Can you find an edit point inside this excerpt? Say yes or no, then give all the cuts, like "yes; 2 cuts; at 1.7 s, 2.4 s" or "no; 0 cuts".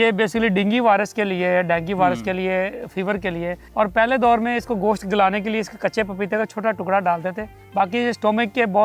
yes; 2 cuts; at 3.6 s, 7.5 s